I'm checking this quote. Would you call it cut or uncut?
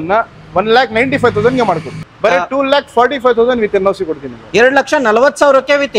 cut